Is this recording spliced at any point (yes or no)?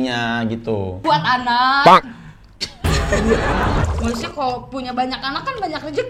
yes